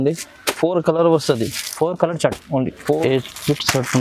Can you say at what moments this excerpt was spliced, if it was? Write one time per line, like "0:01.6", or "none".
0:03.0